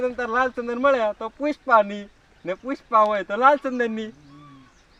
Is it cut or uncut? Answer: uncut